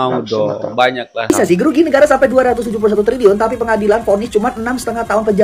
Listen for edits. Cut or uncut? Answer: cut